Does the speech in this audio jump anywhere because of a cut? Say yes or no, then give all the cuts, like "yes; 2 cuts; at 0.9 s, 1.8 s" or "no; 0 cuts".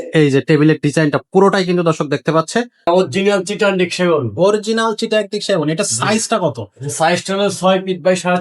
yes; 1 cut; at 2.9 s